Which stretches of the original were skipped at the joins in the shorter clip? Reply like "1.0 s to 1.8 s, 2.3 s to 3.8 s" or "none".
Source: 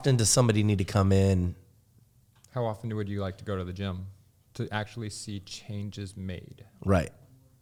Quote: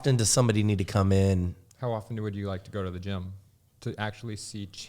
1.6 s to 2.4 s